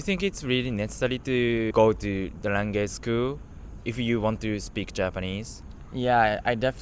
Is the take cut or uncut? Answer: cut